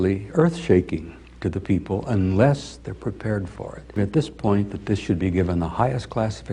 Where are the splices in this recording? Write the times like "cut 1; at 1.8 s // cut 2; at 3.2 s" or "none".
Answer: cut 1; at 4.0 s

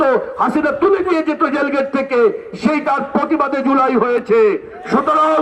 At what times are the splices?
none

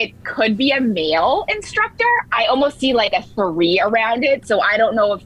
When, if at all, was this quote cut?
cut 1; at 2.3 s

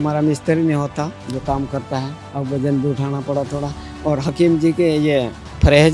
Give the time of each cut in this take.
cut 1; at 1.2 s // cut 2; at 2.2 s

